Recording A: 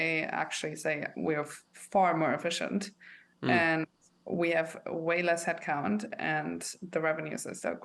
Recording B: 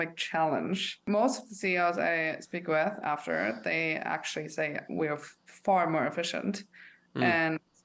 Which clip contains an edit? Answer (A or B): B